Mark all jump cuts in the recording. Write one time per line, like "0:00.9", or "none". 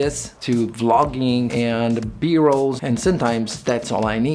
0:02.8